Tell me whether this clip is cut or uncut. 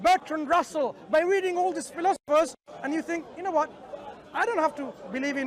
uncut